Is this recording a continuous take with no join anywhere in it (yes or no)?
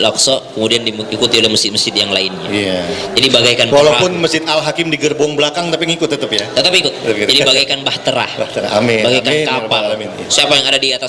yes